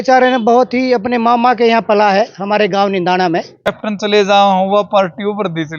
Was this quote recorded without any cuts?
no; 1 cut; at 3.7 s

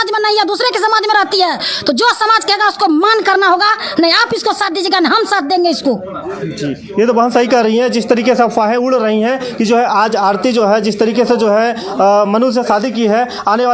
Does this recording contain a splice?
no; 0 cuts

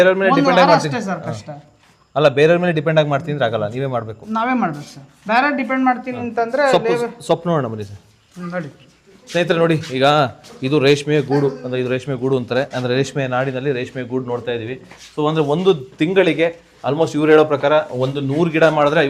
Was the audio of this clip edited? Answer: no; 0 cuts

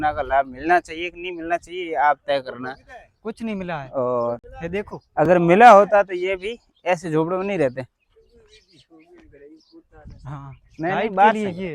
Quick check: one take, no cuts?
yes; 0 cuts

